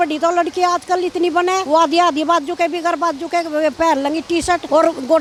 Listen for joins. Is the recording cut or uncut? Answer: uncut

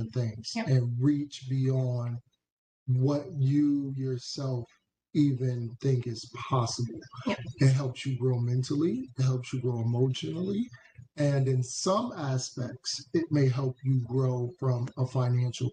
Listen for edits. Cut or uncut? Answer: uncut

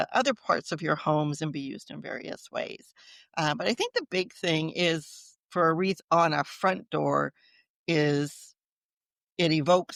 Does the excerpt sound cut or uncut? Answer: uncut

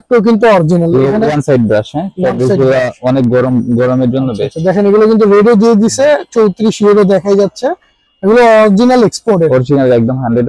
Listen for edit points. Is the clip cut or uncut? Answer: uncut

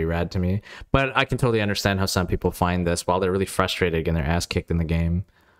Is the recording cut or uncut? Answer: uncut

